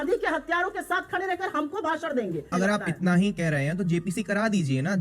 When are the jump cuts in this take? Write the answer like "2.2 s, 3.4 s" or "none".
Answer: 2.5 s